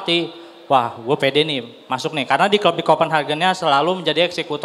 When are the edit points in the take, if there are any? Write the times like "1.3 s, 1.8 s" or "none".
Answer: none